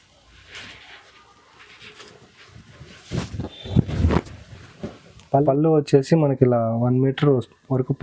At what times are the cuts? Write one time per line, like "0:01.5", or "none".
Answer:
0:05.4